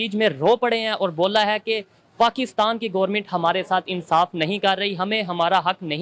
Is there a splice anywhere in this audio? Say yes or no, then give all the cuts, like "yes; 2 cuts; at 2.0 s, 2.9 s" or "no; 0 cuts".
no; 0 cuts